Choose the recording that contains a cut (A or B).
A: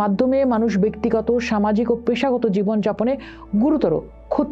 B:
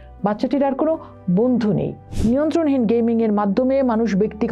B